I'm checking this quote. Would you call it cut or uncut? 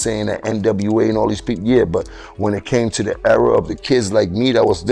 uncut